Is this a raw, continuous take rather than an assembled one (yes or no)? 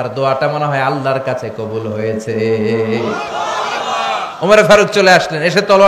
yes